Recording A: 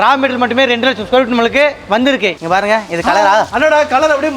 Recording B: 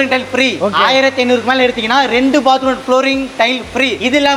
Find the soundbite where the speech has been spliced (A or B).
A